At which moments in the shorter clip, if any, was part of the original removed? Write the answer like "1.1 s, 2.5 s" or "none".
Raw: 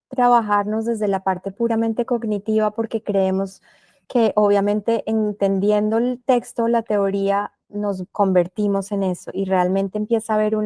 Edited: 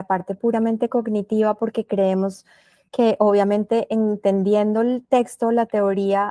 none